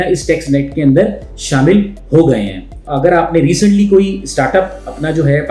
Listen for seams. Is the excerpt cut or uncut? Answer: cut